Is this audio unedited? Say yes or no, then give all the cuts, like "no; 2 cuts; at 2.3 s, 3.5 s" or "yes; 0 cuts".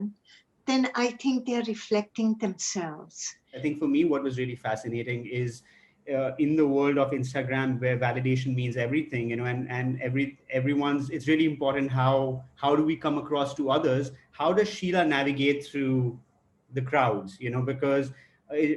no; 1 cut; at 3.5 s